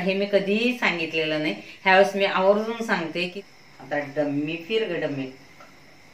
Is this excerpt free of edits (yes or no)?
no